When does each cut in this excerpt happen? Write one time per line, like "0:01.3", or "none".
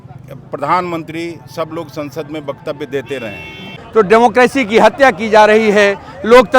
0:03.8